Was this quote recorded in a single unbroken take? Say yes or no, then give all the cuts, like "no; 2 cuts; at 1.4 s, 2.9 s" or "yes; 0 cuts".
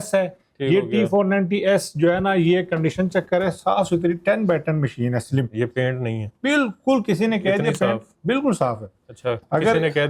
yes; 0 cuts